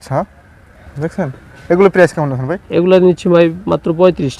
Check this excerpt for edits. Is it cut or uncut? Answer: uncut